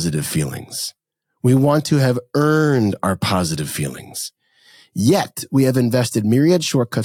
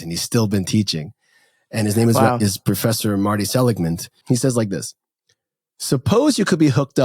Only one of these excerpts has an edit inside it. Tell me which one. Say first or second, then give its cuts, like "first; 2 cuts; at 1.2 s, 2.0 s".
second; 1 cut; at 4.1 s